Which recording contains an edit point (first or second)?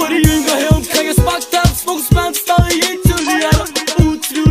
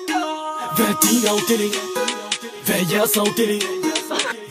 second